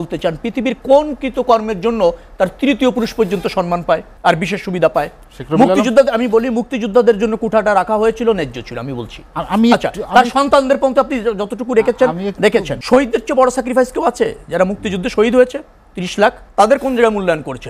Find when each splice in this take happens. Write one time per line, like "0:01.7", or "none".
0:04.1
0:12.7
0:16.4